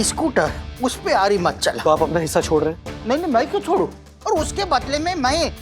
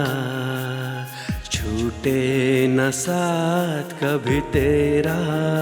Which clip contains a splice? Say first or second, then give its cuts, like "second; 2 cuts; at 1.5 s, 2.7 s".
first; 2 cuts; at 1.8 s, 4.1 s